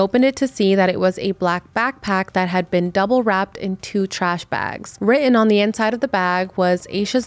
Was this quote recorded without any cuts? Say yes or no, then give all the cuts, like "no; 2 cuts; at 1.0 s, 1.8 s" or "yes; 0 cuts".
no; 1 cut; at 4.8 s